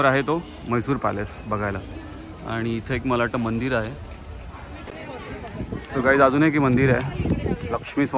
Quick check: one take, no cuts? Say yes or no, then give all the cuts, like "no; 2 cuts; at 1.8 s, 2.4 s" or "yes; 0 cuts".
no; 1 cut; at 4.8 s